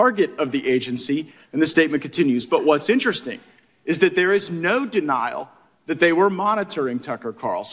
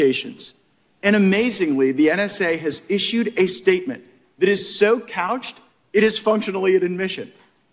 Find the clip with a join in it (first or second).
first